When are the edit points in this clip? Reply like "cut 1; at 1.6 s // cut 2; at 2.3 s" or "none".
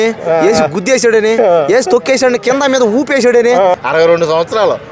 cut 1; at 3.7 s